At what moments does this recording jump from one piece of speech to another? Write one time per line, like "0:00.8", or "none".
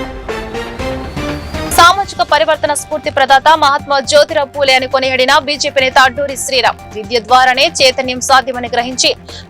0:01.7